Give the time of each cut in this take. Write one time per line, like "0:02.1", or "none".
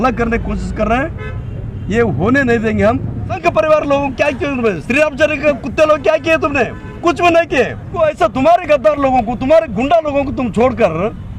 0:03.4
0:08.0

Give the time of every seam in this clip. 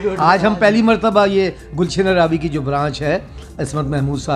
none

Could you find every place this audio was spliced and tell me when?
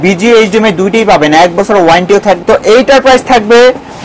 0:02.4

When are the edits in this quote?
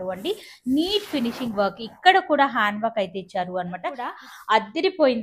0:04.1

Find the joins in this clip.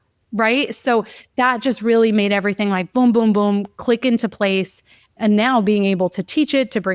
0:05.2

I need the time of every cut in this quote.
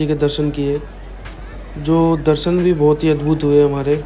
none

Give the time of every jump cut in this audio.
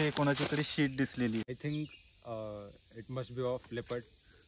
0:01.5

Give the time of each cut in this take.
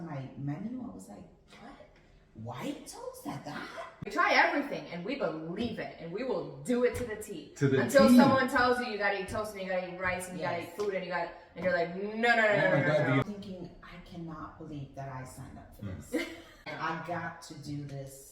0:04.1
0:13.2
0:16.7

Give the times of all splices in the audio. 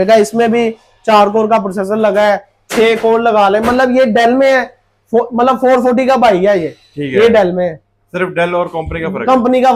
none

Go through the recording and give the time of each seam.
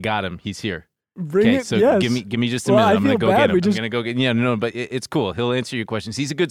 0:03.8

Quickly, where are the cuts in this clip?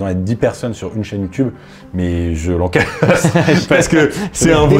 none

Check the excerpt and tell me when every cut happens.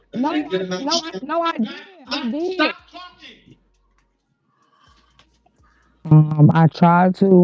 0:06.1

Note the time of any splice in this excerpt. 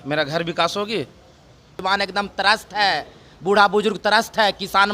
0:01.8

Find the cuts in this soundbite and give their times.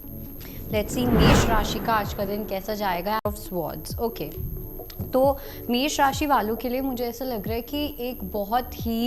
0:03.3

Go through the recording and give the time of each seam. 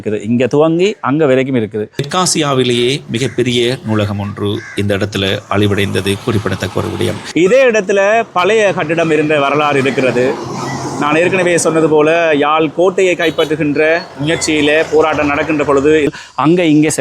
0:02.0
0:07.2
0:16.1

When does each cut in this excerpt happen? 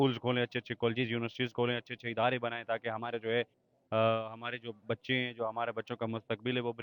none

